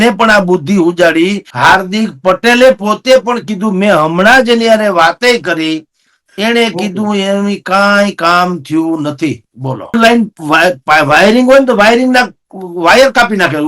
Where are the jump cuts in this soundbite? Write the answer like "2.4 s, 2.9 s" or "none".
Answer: 1.5 s, 9.9 s